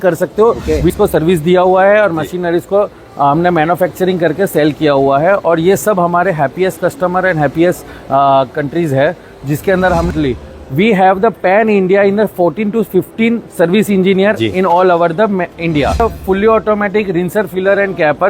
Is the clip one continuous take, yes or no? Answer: no